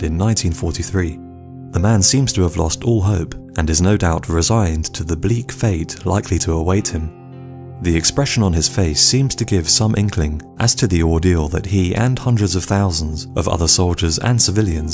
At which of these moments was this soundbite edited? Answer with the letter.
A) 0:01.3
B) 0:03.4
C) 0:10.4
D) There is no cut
A